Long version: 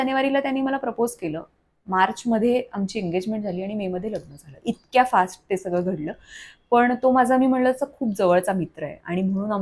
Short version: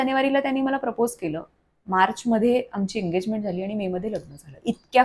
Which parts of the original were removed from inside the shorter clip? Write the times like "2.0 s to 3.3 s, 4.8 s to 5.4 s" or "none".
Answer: none